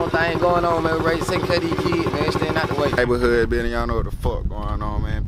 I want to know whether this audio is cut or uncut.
cut